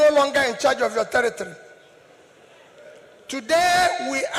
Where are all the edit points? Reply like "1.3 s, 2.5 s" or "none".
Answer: none